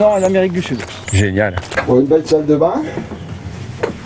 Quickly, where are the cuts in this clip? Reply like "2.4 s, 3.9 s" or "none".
1.7 s